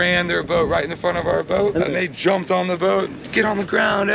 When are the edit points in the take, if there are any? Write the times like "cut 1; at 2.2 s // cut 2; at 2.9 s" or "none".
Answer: cut 1; at 1.8 s

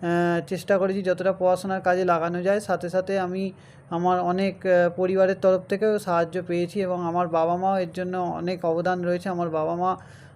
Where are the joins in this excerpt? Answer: none

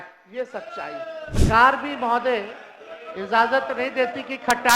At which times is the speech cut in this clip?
cut 1; at 1.4 s

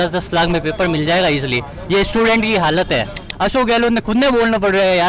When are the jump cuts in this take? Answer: cut 1; at 3.2 s

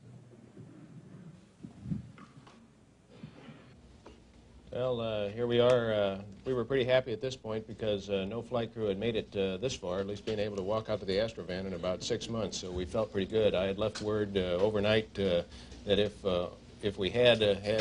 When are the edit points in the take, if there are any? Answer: none

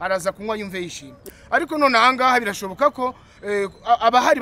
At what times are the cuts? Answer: cut 1; at 1.2 s

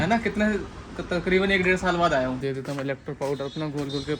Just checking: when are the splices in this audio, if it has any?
cut 1; at 2.4 s

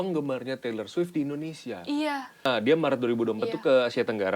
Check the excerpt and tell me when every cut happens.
cut 1; at 2.4 s

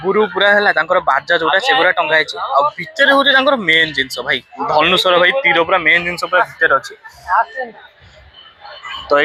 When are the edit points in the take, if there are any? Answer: none

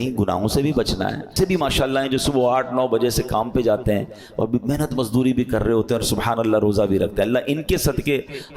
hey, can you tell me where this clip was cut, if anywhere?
cut 1; at 1.3 s

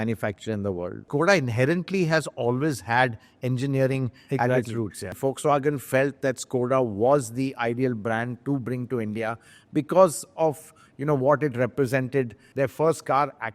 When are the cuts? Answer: cut 1; at 1.0 s // cut 2; at 5.1 s // cut 3; at 12.4 s

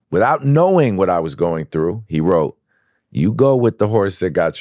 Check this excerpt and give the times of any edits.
none

